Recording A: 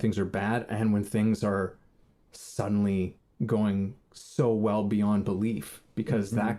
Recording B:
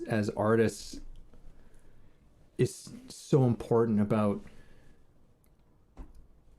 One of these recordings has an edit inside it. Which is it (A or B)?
B